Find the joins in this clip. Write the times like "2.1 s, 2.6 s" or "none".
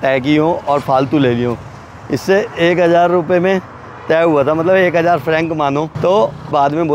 none